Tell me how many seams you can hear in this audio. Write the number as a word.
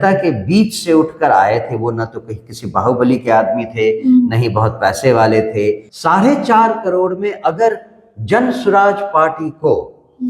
one